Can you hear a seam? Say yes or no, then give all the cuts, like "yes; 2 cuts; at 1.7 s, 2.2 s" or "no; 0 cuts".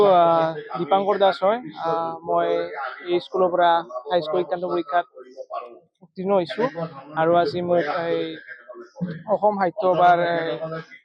no; 0 cuts